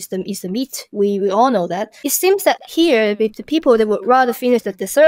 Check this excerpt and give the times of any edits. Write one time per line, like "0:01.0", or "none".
0:02.0